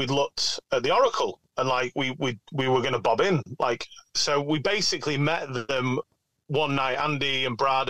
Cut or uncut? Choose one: uncut